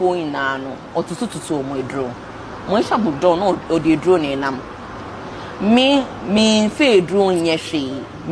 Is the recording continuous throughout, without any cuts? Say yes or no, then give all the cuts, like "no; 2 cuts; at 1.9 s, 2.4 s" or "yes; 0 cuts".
yes; 0 cuts